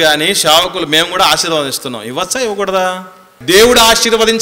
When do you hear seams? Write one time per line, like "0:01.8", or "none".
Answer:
0:03.3